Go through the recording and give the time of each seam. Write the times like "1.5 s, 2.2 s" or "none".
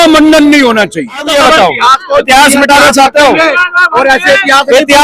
1.3 s